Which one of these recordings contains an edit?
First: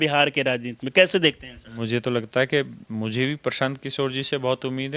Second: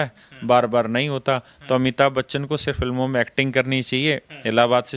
first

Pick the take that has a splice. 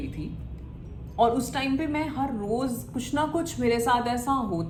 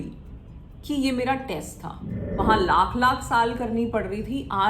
second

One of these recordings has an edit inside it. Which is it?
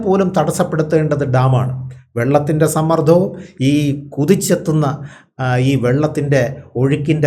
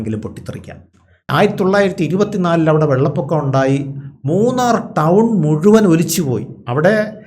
second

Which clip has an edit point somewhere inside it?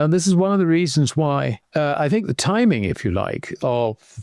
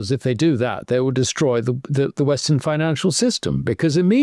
first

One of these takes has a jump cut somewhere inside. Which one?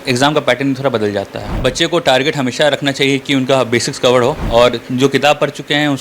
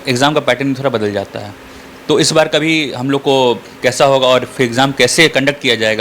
first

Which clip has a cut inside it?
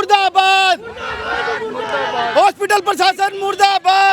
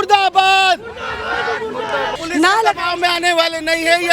second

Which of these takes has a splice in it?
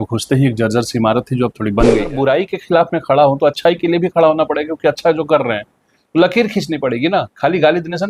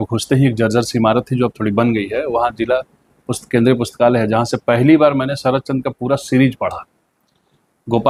first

